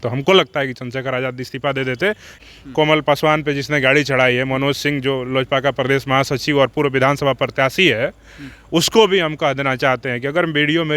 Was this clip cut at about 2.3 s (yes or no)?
yes